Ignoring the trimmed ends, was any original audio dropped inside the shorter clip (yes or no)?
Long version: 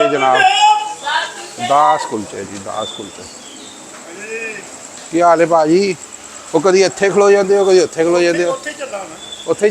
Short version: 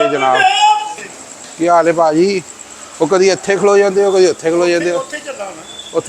yes